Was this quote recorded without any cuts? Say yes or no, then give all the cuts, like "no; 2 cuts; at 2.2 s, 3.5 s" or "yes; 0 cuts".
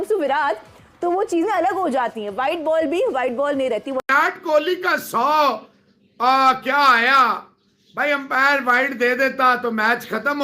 no; 1 cut; at 4.0 s